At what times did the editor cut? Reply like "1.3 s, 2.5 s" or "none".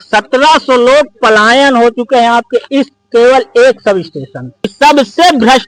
4.7 s